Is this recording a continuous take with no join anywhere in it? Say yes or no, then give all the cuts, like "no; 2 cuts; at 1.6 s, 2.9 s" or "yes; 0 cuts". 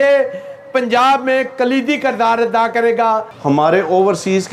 yes; 0 cuts